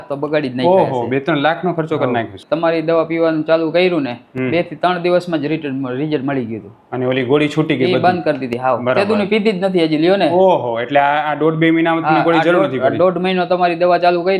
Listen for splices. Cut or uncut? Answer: cut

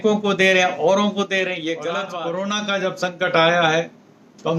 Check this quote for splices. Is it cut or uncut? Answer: cut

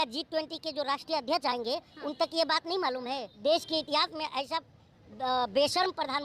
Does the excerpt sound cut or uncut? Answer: cut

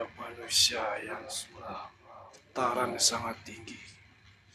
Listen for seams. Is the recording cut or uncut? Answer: cut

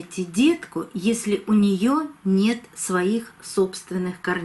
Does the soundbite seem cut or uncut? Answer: uncut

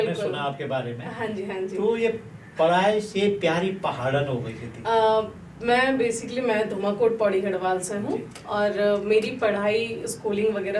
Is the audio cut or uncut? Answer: uncut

